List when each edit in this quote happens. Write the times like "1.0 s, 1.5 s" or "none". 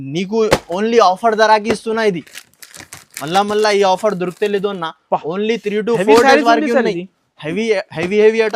none